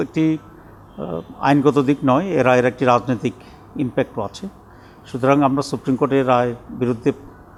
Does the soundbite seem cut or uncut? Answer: uncut